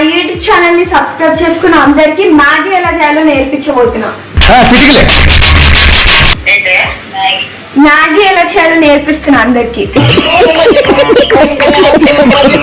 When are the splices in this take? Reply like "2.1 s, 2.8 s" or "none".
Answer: none